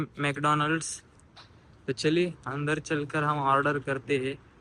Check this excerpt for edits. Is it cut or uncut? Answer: uncut